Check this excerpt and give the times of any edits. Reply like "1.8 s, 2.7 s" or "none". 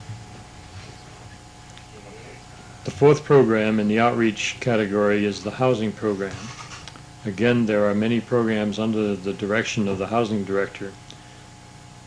1.6 s